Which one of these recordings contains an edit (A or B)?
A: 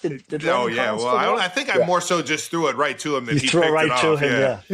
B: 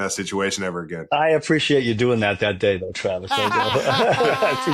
B